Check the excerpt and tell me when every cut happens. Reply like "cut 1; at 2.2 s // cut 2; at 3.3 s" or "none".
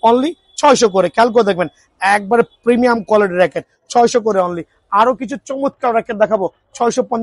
none